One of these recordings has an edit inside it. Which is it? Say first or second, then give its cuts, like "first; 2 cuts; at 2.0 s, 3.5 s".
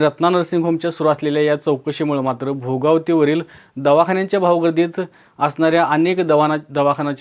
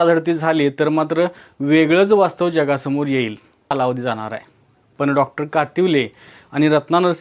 second; 1 cut; at 3.7 s